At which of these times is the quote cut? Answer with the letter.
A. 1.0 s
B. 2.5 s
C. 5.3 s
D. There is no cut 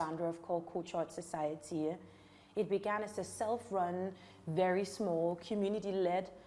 D